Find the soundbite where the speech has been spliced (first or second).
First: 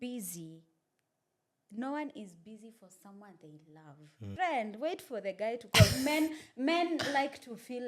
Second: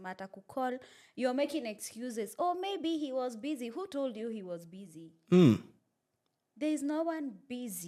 first